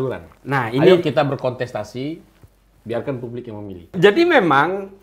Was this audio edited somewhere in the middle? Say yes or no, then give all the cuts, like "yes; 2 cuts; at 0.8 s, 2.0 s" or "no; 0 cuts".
yes; 1 cut; at 3.9 s